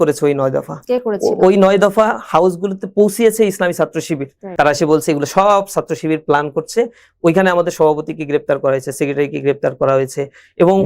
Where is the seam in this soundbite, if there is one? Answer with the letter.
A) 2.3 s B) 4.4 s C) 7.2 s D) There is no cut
B